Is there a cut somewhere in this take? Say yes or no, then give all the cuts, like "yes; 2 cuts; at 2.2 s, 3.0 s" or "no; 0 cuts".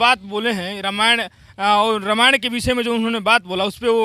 no; 0 cuts